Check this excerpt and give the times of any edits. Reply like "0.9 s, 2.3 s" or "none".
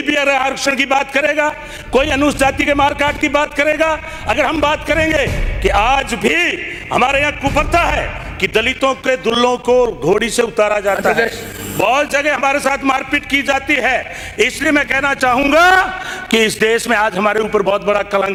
none